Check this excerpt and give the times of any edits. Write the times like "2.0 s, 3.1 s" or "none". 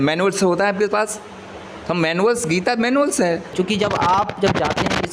3.5 s